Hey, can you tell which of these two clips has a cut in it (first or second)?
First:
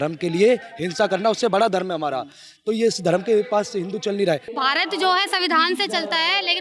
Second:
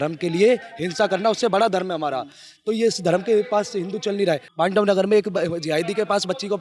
first